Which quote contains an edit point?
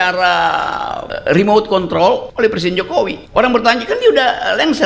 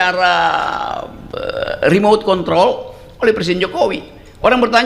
first; 3 cuts; at 1.1 s, 2.3 s, 3.2 s

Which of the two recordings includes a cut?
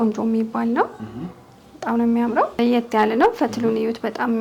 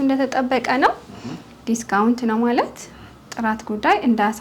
first; 1 cut; at 2.6 s

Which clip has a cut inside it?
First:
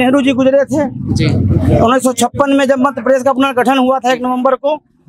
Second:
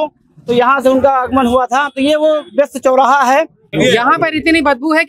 second; 1 cut; at 3.8 s

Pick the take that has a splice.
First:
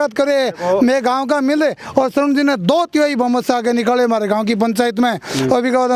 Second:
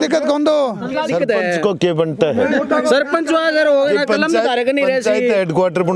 second; 1 cut; at 1.1 s

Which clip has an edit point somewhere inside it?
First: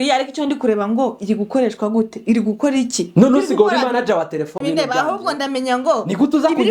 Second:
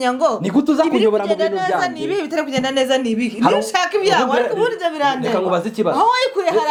first; 1 cut; at 4.5 s

